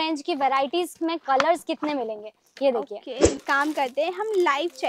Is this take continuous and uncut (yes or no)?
no